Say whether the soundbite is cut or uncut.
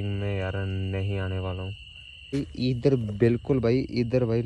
cut